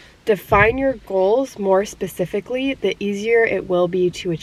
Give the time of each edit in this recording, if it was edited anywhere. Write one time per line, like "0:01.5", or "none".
none